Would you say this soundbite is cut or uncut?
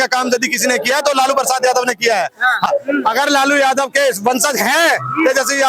cut